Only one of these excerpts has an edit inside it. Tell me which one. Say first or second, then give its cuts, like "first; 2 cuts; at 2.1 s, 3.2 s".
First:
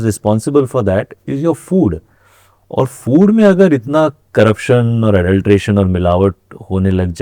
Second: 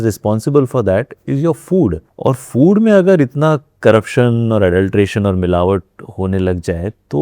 second; 1 cut; at 2.1 s